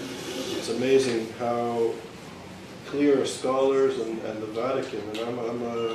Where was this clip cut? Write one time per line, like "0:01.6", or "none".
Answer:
0:01.0